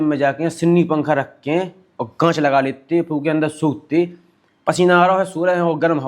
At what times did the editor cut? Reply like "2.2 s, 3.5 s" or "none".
none